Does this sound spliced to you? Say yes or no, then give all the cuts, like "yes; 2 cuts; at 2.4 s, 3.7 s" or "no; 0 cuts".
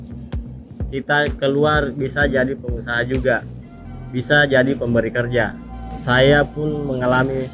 yes; 1 cut; at 5.9 s